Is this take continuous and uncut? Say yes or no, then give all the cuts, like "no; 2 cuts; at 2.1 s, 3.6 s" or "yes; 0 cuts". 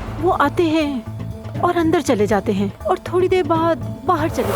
yes; 0 cuts